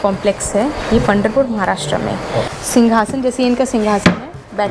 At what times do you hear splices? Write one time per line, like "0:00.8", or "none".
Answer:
0:02.5